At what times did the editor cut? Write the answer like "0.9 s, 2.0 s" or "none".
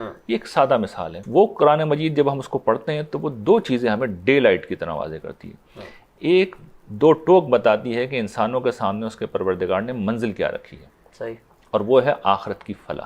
1.2 s